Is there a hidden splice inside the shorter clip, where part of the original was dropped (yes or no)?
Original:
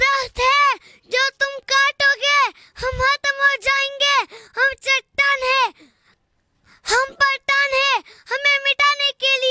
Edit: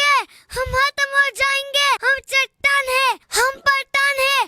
yes